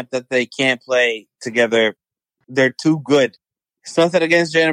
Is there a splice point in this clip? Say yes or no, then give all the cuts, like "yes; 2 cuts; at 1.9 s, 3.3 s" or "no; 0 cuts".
yes; 1 cut; at 2.3 s